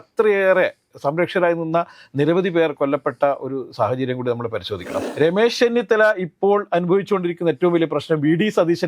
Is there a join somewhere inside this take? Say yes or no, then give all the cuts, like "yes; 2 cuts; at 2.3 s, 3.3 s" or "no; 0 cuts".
yes; 1 cut; at 4.9 s